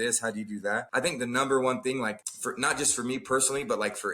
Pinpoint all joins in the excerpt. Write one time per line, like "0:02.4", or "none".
0:00.9
0:02.3